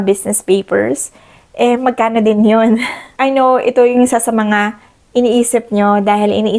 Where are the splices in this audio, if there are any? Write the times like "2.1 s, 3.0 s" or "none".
none